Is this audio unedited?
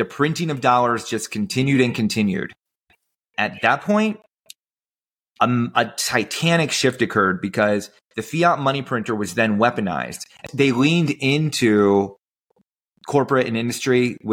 no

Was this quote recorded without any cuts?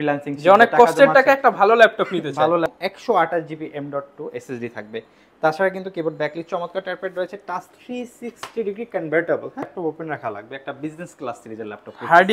no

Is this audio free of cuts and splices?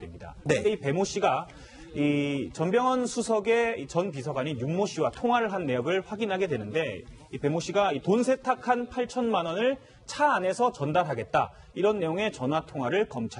yes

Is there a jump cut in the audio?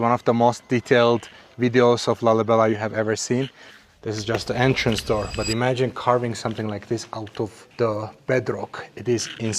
yes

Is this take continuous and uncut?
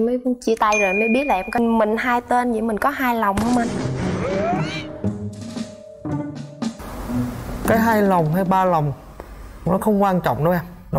no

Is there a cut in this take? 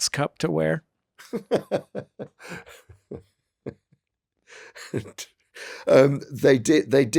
no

